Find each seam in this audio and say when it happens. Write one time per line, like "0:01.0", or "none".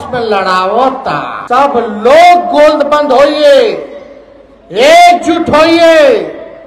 0:01.3